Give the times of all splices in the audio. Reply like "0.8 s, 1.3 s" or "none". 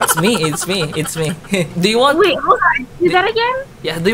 1.7 s